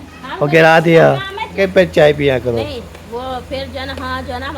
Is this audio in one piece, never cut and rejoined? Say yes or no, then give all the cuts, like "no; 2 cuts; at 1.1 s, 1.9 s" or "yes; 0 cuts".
no; 1 cut; at 1.6 s